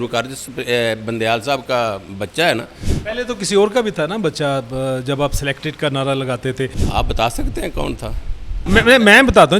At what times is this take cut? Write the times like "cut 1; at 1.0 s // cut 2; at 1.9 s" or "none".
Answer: cut 1; at 6.8 s // cut 2; at 8.6 s